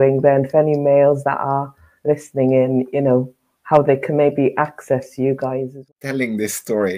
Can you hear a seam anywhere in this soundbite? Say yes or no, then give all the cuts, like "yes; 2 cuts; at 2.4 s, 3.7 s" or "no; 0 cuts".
yes; 1 cut; at 5.7 s